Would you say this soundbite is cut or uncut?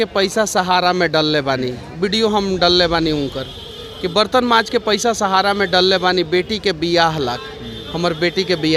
uncut